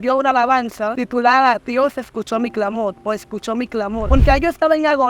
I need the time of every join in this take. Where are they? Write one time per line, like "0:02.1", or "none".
0:00.9
0:04.1